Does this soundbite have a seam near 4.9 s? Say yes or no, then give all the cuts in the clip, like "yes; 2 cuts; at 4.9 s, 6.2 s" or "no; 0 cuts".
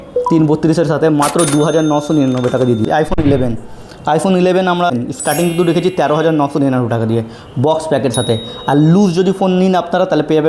yes; 2 cuts; at 2.8 s, 4.9 s